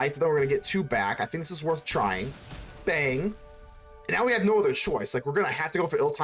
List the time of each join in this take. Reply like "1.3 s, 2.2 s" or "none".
none